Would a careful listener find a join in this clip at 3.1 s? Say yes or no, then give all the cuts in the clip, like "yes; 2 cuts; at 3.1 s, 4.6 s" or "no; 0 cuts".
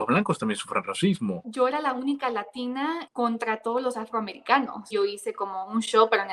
yes; 3 cuts; at 1.4 s, 3.1 s, 4.9 s